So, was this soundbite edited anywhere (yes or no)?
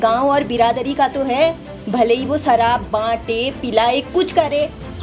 no